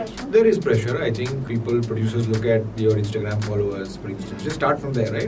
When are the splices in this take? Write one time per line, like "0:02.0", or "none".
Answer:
0:01.4